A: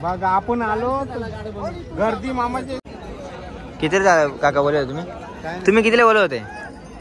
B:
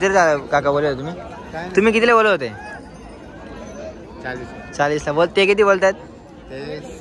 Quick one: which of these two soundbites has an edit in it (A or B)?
A